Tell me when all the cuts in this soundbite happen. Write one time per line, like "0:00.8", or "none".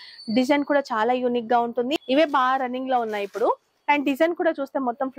0:02.0